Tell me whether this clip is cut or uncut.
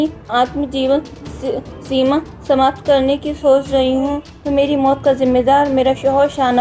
cut